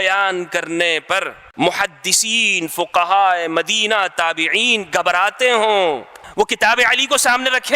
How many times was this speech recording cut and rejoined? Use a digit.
2